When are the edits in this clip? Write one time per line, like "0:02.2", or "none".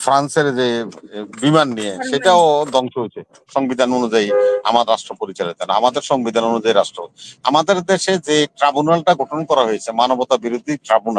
0:03.5